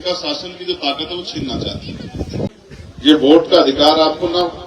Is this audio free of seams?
no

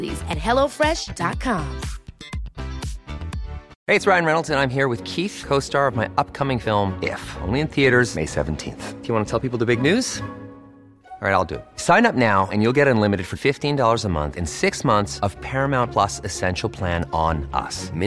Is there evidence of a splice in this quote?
yes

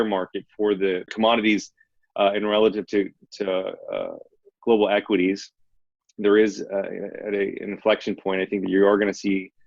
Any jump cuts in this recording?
yes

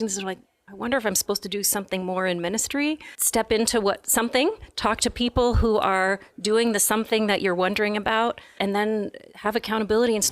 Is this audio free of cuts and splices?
no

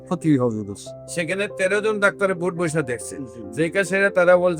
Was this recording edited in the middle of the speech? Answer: no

